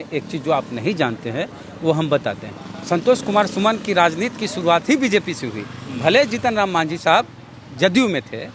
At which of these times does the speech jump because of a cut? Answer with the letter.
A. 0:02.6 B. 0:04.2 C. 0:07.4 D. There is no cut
D